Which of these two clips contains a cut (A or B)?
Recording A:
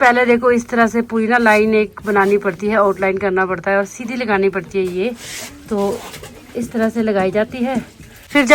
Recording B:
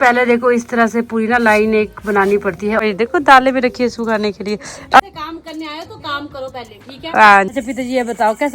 B